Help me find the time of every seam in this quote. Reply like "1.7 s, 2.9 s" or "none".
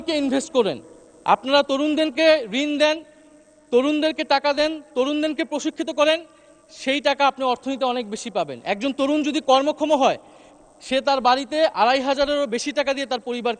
none